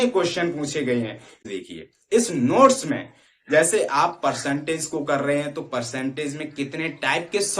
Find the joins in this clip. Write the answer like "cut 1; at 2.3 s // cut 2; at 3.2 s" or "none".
cut 1; at 1.4 s